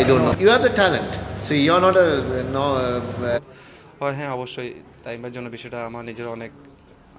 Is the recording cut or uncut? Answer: cut